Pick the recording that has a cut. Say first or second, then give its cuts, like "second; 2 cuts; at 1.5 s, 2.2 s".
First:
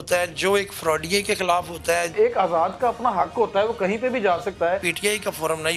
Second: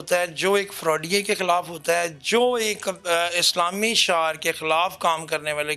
first; 2 cuts; at 2.1 s, 4.9 s